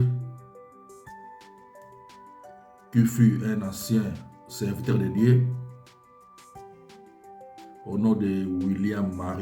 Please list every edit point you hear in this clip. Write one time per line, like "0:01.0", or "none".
0:05.8
0:07.8